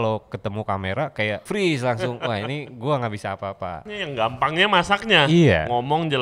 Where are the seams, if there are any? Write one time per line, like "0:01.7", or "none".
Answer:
0:01.4
0:03.8